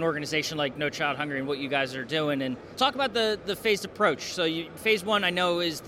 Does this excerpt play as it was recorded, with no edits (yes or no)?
no